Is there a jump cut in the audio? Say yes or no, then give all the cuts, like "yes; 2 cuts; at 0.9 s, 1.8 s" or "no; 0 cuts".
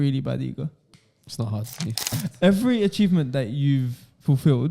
yes; 1 cut; at 2.1 s